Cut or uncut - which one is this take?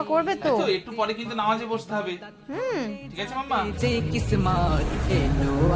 uncut